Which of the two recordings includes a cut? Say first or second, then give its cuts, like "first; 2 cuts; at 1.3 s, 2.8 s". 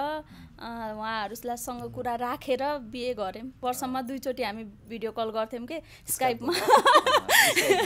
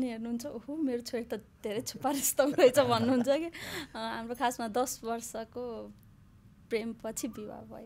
first; 1 cut; at 3.5 s